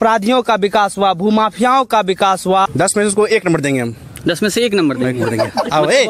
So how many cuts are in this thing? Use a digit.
1